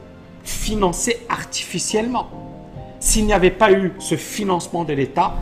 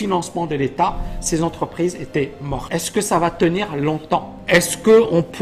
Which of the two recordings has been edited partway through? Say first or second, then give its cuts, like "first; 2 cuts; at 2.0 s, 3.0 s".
second; 2 cuts; at 2.5 s, 4.3 s